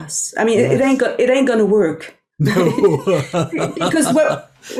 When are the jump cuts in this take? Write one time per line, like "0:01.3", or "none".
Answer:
none